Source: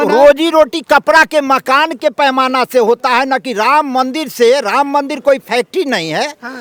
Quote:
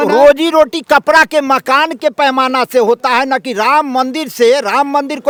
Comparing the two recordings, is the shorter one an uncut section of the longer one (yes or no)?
yes